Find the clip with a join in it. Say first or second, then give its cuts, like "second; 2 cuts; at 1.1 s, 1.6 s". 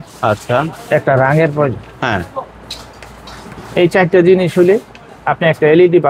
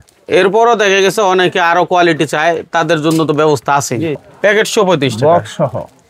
second; 1 cut; at 4.1 s